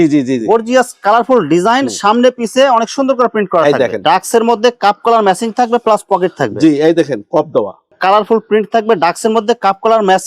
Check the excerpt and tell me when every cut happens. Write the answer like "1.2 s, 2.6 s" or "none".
4.0 s, 7.8 s